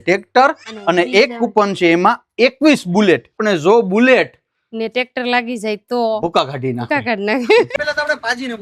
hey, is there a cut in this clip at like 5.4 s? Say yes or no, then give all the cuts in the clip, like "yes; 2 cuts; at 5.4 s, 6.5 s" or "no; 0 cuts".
no; 2 cuts; at 3.4 s, 7.7 s